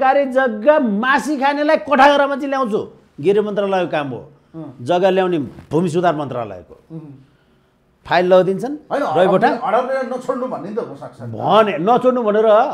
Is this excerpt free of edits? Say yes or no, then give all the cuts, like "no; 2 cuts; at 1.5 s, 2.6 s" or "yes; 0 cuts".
yes; 0 cuts